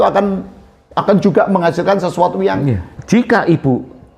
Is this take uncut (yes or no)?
no